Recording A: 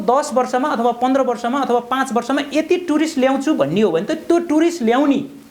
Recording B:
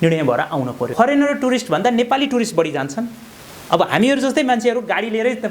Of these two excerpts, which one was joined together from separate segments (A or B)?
B